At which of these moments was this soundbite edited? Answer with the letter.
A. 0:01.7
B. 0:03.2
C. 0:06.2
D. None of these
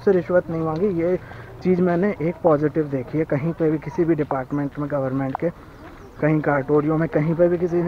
D